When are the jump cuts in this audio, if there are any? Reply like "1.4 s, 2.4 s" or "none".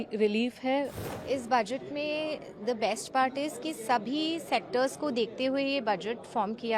1.0 s